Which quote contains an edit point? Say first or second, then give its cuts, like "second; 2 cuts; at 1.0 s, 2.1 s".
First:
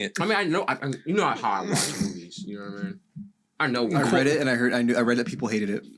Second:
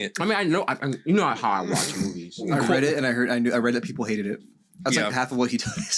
second; 1 cut; at 2.4 s